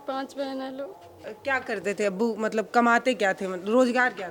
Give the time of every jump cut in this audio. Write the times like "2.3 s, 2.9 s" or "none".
1.3 s

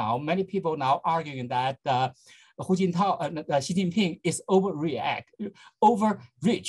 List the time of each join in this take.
none

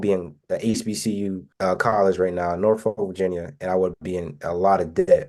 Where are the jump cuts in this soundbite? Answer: none

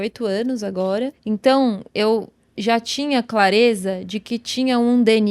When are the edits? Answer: 1.2 s

